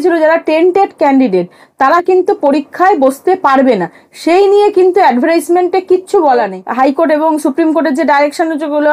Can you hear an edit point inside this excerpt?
yes; 1 cut; at 6.6 s

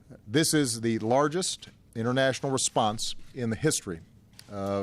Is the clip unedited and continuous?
yes; 0 cuts

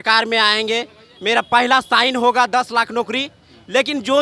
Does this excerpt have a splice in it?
no; 0 cuts

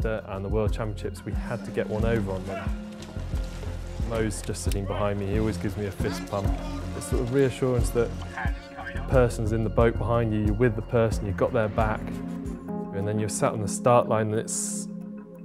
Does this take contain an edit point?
yes; 1 cut; at 8.7 s

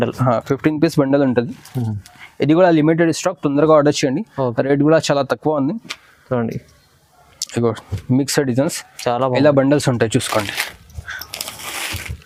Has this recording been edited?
no; 0 cuts

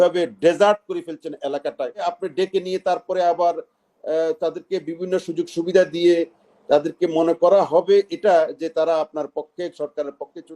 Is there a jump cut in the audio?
yes; 1 cut; at 2.0 s

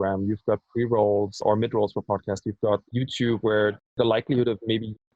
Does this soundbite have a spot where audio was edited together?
yes; 2 cuts; at 1.4 s, 2.9 s

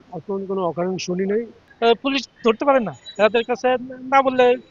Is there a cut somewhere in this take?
yes; 1 cut; at 1.6 s

